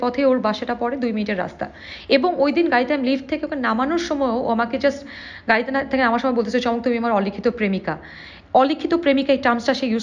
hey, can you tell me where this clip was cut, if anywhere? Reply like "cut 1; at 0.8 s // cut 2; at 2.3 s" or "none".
none